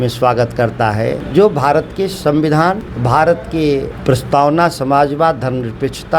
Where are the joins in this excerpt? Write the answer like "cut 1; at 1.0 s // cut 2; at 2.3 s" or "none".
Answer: cut 1; at 1.2 s // cut 2; at 2.9 s // cut 3; at 3.9 s